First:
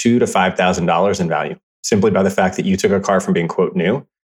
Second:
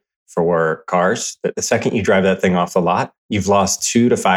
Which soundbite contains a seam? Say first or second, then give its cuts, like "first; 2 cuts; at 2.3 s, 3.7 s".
second; 1 cut; at 1.6 s